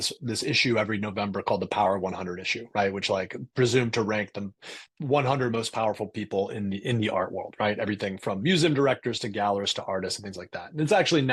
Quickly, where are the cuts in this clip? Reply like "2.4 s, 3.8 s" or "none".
none